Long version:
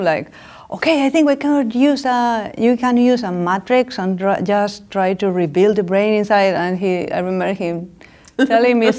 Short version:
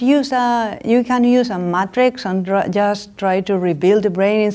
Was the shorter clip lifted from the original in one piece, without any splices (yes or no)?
yes